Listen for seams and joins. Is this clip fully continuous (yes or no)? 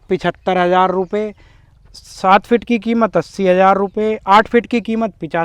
yes